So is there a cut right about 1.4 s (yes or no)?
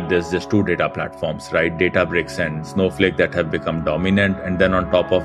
no